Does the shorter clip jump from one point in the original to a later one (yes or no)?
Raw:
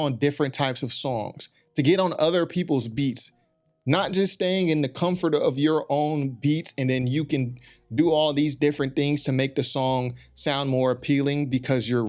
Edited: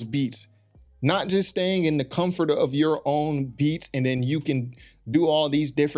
no